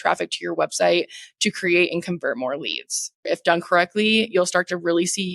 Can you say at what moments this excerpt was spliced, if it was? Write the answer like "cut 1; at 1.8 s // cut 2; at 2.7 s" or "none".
cut 1; at 3.3 s

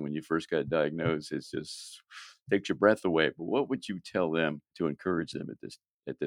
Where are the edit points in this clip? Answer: cut 1; at 4.7 s

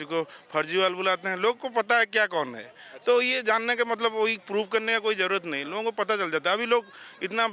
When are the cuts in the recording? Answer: none

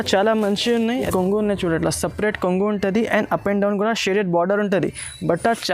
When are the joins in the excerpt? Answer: cut 1; at 1.0 s

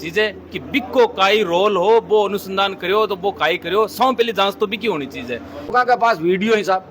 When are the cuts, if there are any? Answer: cut 1; at 5.7 s

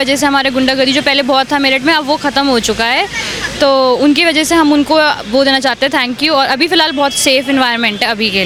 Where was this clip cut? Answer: none

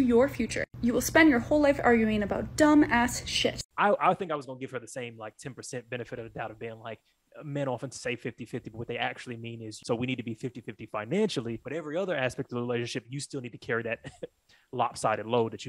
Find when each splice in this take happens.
cut 1; at 3.6 s // cut 2; at 9.7 s // cut 3; at 11.6 s

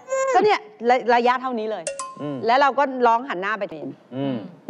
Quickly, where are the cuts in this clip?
cut 1; at 3.8 s

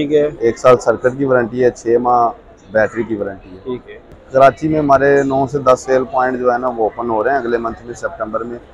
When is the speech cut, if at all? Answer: cut 1; at 4.1 s

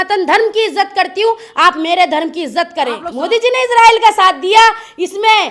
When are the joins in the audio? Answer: cut 1; at 3.0 s

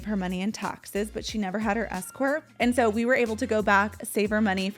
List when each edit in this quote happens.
cut 1; at 2.5 s

